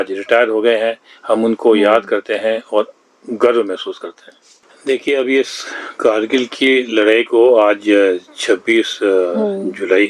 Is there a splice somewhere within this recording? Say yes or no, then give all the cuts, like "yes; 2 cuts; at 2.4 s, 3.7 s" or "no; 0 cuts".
yes; 1 cut; at 4.7 s